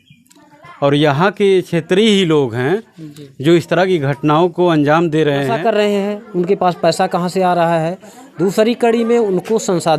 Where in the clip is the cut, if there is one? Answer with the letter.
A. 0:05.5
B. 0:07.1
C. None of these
A